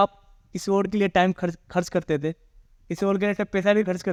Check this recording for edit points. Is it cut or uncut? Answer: uncut